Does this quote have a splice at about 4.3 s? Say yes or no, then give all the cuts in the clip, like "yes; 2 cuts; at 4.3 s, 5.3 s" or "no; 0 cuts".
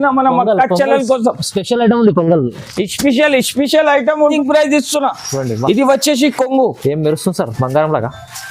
yes; 1 cut; at 4.3 s